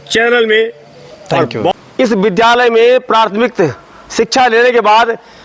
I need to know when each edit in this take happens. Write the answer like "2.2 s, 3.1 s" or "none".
1.7 s

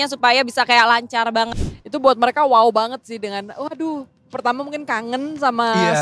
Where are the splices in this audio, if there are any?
1.5 s

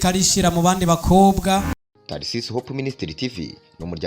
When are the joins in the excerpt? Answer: 1.7 s

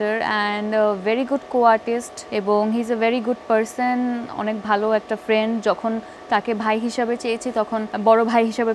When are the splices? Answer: 2.2 s, 7.9 s

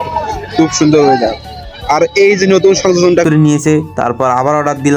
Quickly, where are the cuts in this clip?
3.2 s

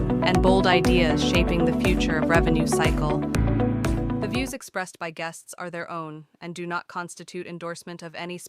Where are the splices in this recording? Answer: 4.3 s

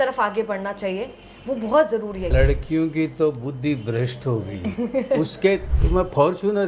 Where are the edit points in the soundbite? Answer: 2.3 s, 5.7 s

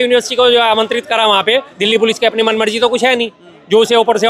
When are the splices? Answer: 1.7 s

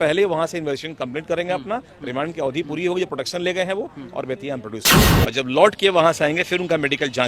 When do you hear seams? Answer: 5.1 s

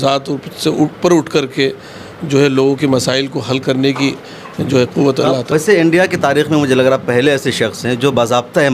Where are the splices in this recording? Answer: 5.5 s

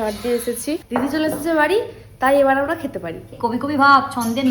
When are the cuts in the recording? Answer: 0.8 s, 3.3 s

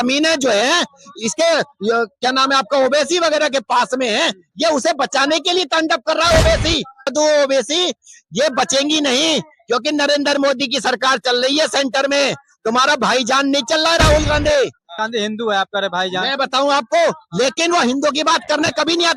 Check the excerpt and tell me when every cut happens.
7.1 s, 15.0 s

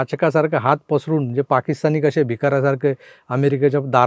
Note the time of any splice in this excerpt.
none

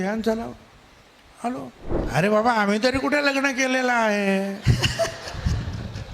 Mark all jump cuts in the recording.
1.9 s

